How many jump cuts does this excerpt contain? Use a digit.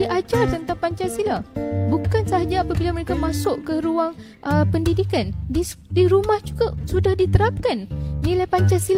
0